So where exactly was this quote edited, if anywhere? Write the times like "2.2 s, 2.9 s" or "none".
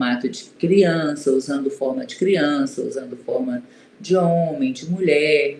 none